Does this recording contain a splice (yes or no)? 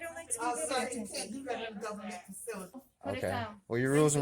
yes